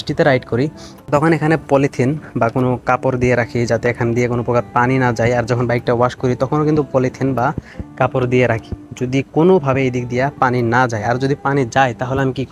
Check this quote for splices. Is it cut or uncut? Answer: uncut